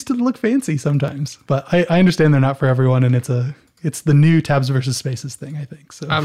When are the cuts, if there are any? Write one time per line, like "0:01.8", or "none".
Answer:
0:01.3